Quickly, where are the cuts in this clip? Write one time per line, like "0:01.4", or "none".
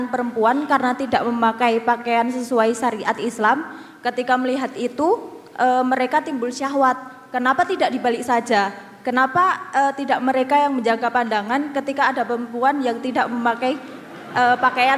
none